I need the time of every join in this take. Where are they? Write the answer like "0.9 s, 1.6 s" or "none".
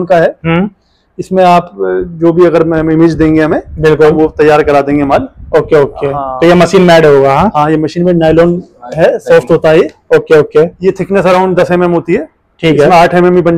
none